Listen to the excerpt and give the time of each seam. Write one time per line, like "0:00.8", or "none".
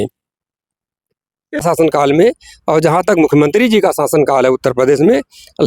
0:01.6